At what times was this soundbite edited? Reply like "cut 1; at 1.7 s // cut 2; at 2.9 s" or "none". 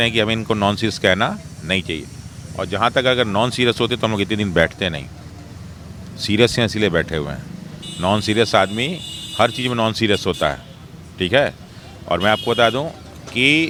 none